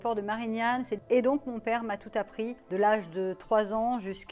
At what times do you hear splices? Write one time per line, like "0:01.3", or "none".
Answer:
0:01.0
0:02.6